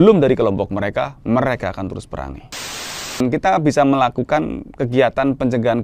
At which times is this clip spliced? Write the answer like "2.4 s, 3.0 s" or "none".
2.9 s